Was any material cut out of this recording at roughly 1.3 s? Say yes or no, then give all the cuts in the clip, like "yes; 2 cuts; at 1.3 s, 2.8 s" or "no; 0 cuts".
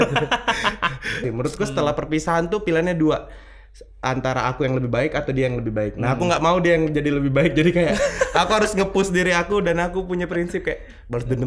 yes; 1 cut; at 1.3 s